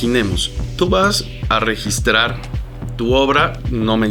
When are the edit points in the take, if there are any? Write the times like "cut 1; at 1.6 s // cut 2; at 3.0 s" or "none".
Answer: cut 1; at 1.3 s